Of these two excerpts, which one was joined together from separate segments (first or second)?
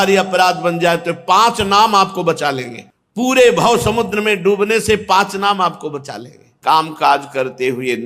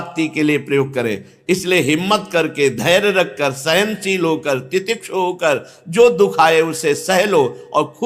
first